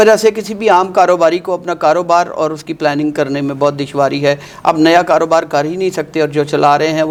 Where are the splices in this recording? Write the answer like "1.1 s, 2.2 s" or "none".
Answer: none